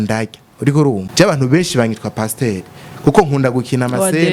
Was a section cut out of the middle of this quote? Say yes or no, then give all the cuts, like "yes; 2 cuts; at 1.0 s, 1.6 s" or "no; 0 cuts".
yes; 1 cut; at 1.1 s